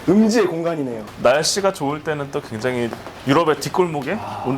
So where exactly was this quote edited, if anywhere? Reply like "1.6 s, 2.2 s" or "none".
1.1 s